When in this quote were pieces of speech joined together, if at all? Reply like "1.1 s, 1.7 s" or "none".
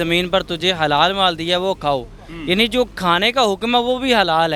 none